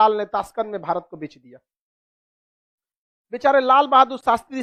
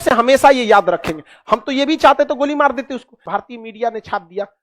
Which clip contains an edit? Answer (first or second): second